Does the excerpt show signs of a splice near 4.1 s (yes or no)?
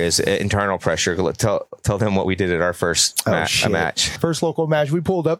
yes